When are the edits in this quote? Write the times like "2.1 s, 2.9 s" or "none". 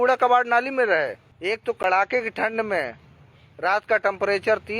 1.3 s